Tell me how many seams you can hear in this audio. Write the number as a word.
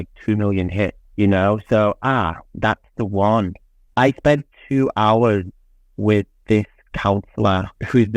one